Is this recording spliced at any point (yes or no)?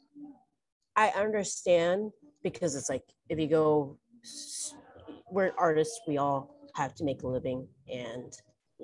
no